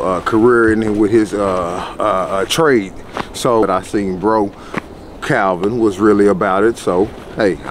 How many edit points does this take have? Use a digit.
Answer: 1